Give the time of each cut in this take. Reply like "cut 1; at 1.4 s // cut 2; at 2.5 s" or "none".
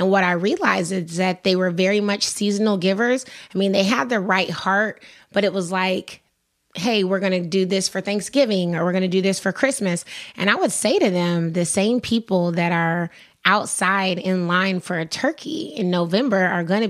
none